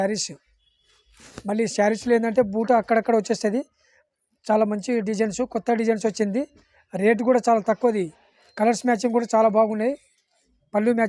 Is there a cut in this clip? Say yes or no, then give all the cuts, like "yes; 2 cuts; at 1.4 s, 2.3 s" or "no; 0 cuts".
no; 0 cuts